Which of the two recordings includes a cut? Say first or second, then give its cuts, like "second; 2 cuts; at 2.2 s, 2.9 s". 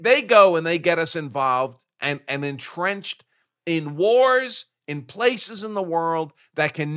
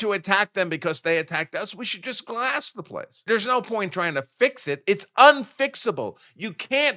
second; 1 cut; at 3.2 s